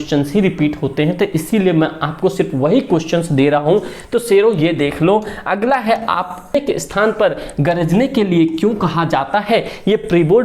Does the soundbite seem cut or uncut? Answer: cut